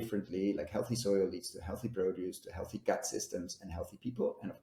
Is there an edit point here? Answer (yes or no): no